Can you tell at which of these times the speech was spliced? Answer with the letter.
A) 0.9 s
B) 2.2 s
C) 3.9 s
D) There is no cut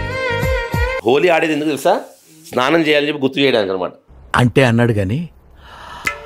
A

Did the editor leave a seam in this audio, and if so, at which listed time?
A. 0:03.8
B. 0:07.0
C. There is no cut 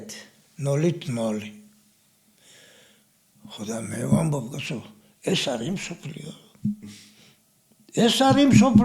C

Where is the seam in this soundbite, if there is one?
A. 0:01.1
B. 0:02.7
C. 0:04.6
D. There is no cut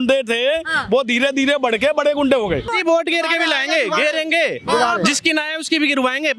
B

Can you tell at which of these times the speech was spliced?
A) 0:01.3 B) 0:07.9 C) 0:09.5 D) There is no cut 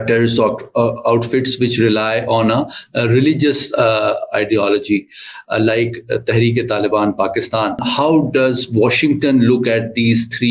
B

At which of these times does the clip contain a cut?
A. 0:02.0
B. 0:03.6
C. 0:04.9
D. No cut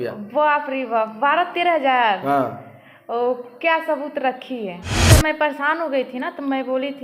C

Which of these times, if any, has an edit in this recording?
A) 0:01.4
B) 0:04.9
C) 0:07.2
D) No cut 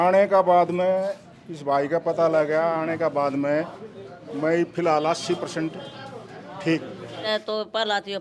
C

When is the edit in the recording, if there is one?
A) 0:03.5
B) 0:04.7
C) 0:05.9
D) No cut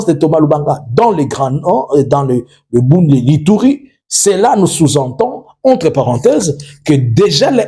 D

